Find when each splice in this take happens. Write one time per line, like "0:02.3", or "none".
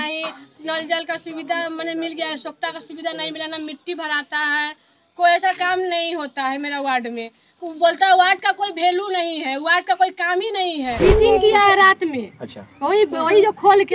0:11.0